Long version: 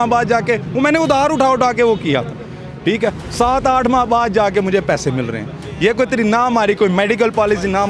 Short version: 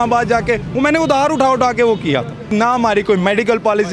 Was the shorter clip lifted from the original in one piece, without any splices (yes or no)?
no